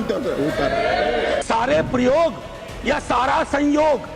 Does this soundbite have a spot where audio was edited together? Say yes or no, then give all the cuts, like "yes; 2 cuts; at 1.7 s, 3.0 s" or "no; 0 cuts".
yes; 1 cut; at 1.4 s